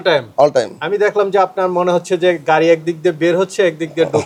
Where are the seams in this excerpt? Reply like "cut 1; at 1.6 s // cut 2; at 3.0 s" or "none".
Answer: none